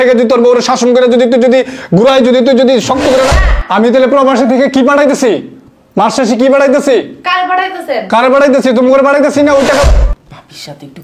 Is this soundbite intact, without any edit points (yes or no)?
no